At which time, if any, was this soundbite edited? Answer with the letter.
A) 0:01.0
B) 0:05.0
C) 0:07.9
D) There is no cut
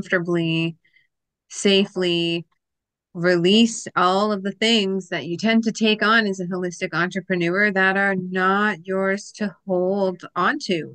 D